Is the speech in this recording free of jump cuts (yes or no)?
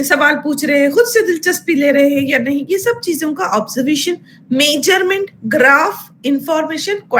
yes